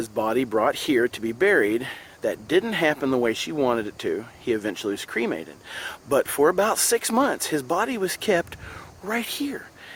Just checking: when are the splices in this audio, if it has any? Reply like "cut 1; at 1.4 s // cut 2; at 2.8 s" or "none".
none